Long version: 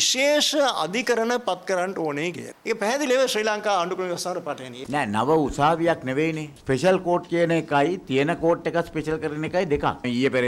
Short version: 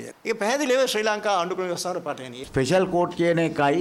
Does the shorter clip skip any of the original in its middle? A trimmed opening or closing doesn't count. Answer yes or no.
yes